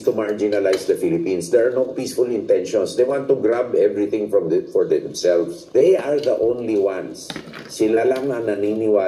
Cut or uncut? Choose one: cut